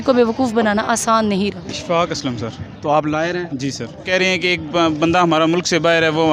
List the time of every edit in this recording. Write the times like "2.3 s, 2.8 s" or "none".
1.7 s, 4.0 s